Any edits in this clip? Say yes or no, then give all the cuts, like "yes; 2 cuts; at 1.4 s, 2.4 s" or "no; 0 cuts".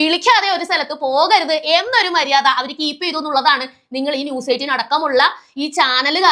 no; 0 cuts